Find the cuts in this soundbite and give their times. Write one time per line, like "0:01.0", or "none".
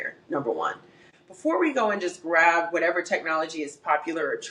0:01.1